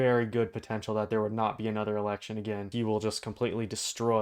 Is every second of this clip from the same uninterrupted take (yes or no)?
no